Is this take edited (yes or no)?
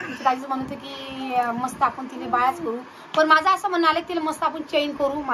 no